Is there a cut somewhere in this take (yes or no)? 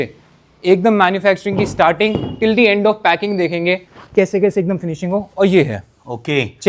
yes